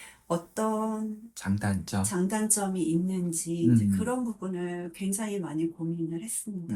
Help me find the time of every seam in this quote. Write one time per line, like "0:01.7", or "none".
none